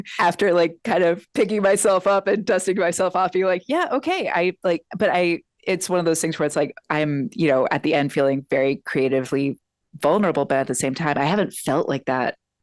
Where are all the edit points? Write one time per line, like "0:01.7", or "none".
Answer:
none